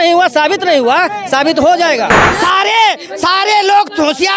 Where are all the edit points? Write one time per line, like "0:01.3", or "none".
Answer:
0:02.2